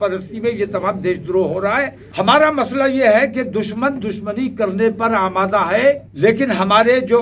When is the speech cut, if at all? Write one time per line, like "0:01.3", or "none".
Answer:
0:02.0
0:06.1